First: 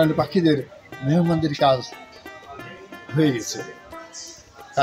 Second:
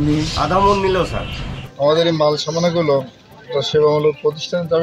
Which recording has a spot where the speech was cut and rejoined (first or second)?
second